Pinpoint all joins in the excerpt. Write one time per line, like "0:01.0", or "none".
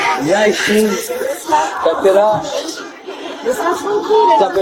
none